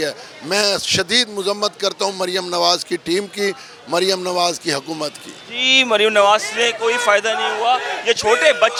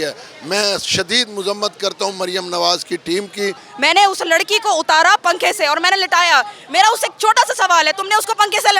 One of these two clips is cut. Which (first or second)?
second